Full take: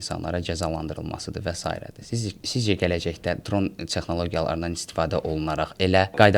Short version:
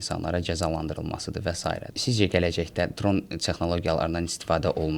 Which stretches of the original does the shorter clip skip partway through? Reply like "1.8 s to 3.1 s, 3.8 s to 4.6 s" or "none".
1.9 s to 2.4 s